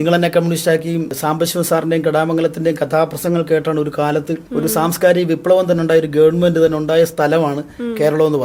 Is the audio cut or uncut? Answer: cut